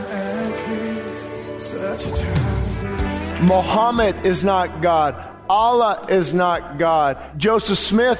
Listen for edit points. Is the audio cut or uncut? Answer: cut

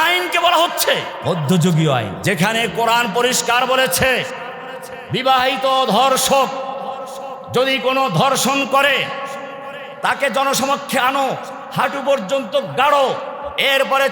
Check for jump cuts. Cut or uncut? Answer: cut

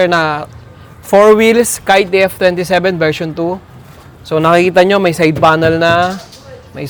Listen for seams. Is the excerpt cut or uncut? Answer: uncut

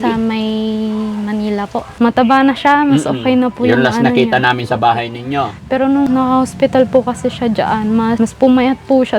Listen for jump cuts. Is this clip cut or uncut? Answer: cut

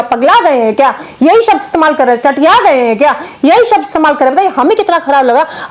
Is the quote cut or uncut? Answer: uncut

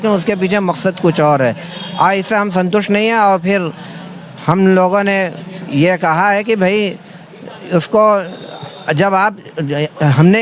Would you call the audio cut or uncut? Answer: uncut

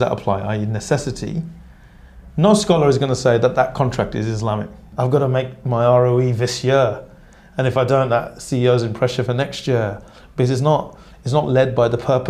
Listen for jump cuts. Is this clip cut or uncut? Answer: cut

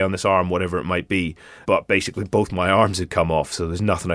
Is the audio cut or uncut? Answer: cut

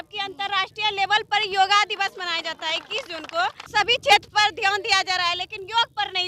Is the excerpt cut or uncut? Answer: cut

